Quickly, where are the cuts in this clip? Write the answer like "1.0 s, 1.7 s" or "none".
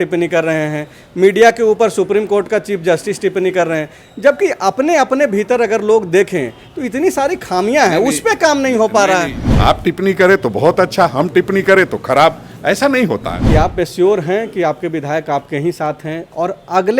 9.4 s, 13.3 s